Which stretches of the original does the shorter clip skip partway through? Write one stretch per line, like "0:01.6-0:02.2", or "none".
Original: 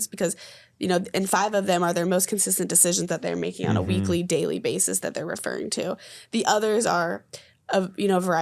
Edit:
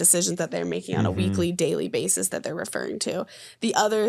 none